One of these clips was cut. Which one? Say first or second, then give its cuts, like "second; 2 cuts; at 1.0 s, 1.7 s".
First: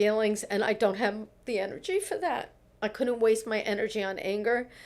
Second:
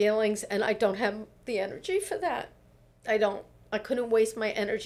first; 1 cut; at 2.6 s